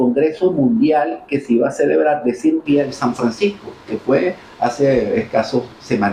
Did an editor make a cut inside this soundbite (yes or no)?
no